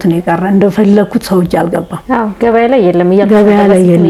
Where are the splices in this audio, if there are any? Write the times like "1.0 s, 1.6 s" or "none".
none